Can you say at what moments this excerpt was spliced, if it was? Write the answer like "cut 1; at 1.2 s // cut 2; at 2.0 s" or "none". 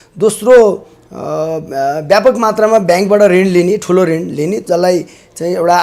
none